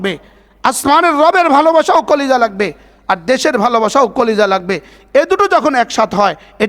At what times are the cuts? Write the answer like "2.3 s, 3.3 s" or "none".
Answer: none